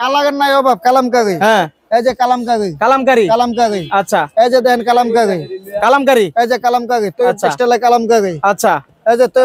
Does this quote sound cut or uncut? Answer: uncut